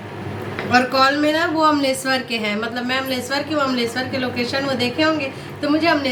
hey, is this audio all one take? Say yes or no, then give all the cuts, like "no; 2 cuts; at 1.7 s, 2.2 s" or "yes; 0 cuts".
yes; 0 cuts